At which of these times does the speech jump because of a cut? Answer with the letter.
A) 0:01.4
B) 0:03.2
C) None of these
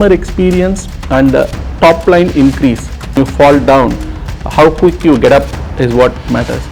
B